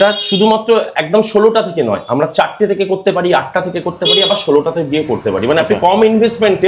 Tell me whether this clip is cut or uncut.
uncut